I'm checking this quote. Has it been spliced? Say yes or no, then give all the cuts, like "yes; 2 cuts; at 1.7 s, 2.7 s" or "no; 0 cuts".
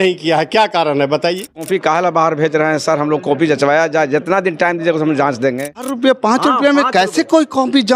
yes; 2 cuts; at 1.7 s, 5.9 s